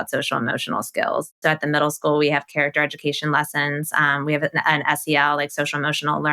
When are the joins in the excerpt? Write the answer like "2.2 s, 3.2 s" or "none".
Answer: 1.4 s